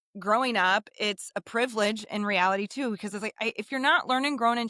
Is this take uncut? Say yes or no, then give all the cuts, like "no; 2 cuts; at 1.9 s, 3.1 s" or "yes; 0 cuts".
yes; 0 cuts